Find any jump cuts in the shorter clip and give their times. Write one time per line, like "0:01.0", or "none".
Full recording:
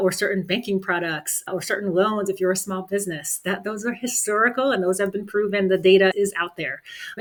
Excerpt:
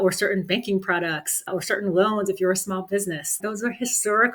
0:03.4

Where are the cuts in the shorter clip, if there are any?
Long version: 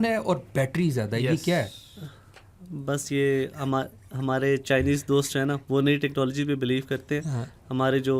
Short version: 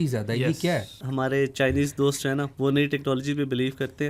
0:01.0

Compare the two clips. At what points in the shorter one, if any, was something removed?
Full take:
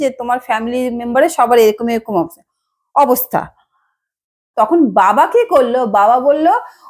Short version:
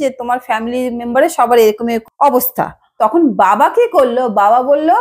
0:02.1
0:02.8

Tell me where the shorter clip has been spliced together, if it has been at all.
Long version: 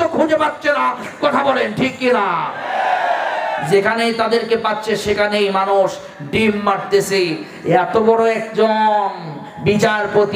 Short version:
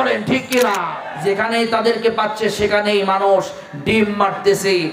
0:01.0

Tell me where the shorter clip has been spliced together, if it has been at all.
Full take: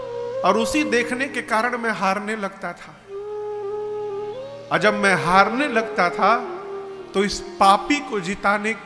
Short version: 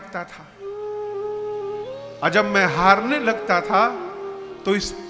none

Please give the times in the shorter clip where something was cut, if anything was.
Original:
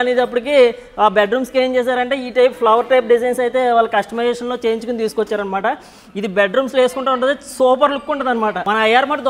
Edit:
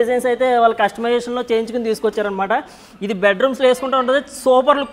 none

